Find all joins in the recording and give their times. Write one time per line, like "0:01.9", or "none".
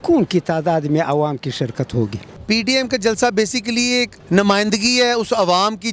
0:02.2
0:04.2